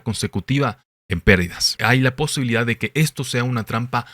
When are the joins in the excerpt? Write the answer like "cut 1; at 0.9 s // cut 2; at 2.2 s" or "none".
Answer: cut 1; at 1.7 s